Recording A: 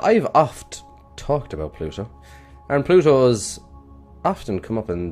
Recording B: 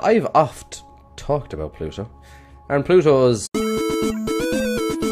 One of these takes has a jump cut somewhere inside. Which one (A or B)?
A